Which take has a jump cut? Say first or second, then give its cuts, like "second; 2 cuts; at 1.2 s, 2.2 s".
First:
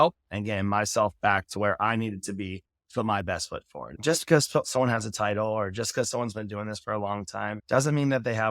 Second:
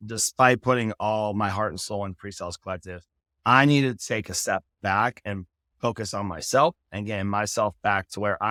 first; 2 cuts; at 3.9 s, 7.6 s